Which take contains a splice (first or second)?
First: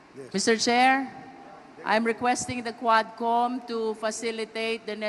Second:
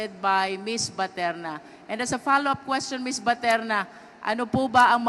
second